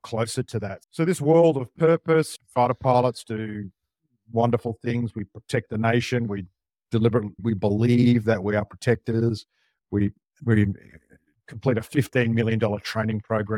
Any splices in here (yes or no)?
no